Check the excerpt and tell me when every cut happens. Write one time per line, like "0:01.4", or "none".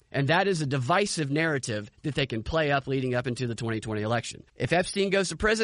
0:04.4